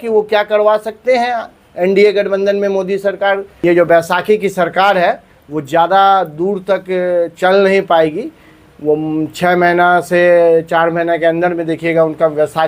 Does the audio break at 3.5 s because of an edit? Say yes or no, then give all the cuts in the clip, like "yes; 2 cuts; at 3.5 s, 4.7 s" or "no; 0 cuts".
yes; 1 cut; at 3.5 s